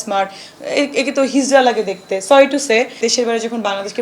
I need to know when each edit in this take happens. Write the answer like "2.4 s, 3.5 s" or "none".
3.0 s